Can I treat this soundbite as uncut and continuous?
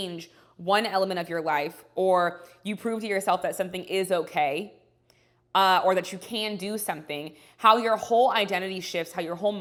yes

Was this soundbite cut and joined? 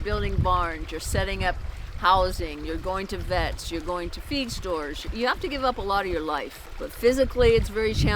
yes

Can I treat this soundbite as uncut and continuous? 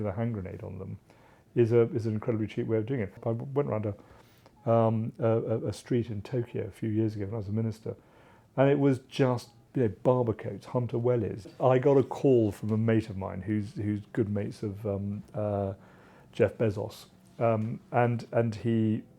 no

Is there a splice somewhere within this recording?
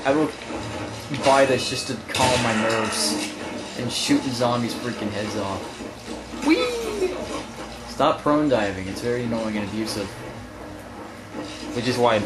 no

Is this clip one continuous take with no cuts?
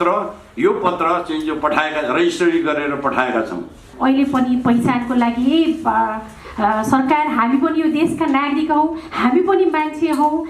no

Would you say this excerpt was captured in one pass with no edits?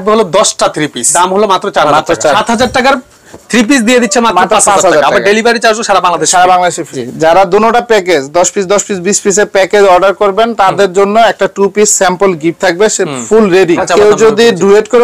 no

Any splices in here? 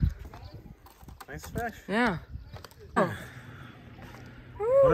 yes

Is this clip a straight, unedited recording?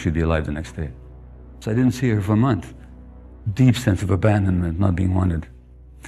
no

